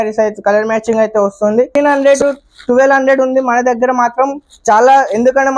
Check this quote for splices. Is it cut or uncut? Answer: cut